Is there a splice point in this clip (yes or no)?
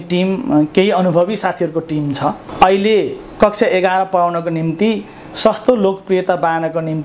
yes